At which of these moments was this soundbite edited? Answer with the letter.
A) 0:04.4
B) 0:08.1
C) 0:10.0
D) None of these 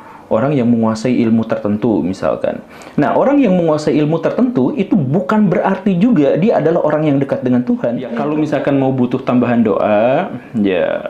B